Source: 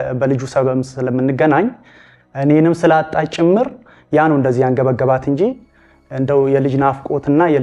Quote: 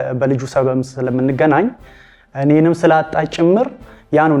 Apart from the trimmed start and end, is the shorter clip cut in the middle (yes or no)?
no